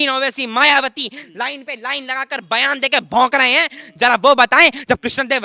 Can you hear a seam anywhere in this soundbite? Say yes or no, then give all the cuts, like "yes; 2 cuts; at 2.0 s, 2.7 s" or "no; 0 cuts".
no; 0 cuts